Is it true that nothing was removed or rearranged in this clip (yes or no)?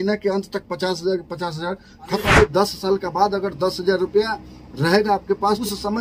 no